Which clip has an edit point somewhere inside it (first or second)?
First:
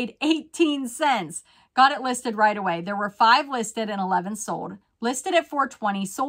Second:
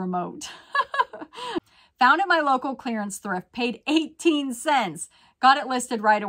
second